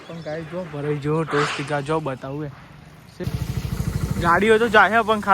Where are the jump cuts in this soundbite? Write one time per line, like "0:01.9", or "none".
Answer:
0:03.2